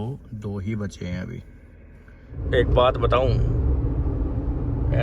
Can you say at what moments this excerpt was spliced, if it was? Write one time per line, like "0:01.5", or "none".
0:02.4